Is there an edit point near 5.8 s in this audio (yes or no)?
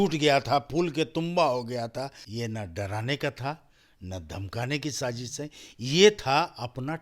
no